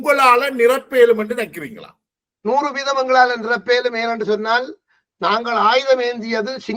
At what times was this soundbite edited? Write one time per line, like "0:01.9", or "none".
none